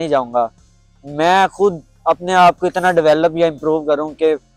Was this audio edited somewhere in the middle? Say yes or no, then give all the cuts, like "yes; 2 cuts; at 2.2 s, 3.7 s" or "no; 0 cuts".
no; 0 cuts